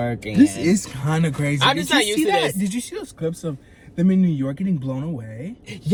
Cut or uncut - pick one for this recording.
uncut